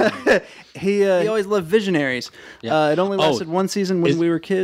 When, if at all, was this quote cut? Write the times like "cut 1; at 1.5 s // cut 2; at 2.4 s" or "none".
cut 1; at 1.2 s